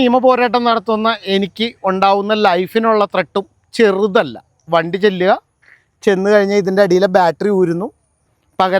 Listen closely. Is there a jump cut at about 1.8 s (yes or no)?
no